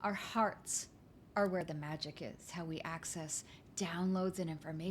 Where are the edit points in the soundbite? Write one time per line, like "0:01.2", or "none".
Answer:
0:02.0

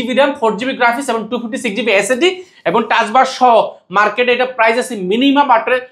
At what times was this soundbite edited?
none

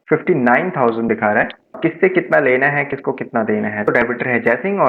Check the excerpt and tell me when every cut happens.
0:01.8
0:03.9

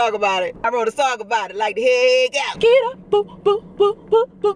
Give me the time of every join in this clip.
0:02.5

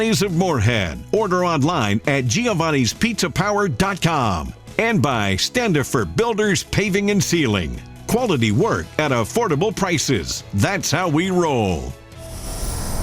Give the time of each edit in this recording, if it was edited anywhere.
0:12.1

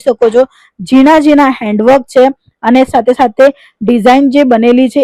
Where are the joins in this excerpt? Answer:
none

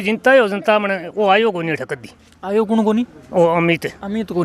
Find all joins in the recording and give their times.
none

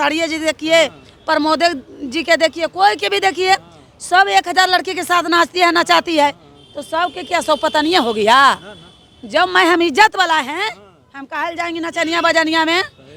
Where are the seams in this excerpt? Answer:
none

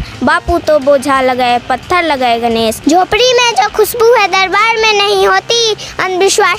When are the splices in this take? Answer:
0:02.8

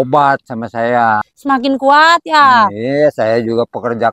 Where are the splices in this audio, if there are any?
0:01.3

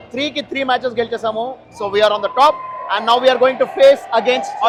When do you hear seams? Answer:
none

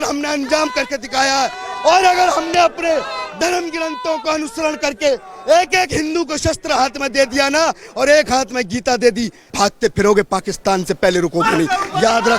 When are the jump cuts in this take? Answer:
0:09.5

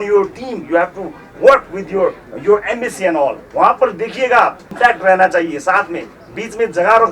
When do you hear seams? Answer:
0:04.6

